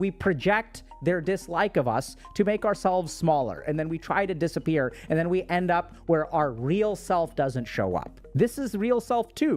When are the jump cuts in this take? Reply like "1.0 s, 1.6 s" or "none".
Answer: 8.2 s